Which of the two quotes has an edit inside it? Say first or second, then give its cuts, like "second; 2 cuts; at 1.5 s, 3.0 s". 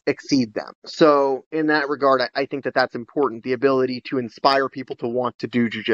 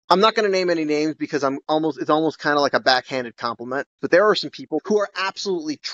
second; 2 cuts; at 4.0 s, 4.8 s